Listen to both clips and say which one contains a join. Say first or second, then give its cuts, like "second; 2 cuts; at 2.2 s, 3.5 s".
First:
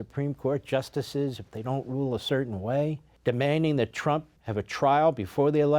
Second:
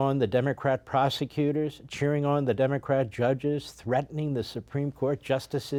first; 2 cuts; at 3.1 s, 4.4 s